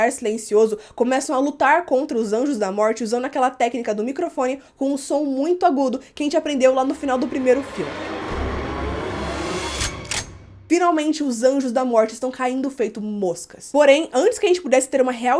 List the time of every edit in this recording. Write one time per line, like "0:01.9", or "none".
0:13.5